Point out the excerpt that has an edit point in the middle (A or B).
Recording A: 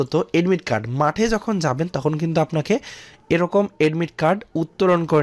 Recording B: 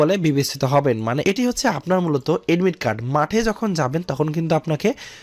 B